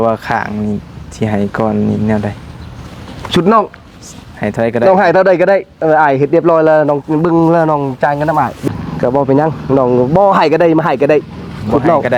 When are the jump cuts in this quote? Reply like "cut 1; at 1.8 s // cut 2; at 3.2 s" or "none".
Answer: cut 1; at 8.6 s